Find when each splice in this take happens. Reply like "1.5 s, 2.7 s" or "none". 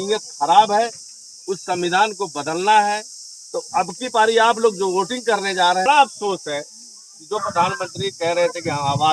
5.9 s